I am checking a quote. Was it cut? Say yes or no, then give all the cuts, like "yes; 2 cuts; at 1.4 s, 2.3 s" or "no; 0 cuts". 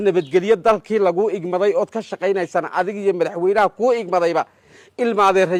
no; 0 cuts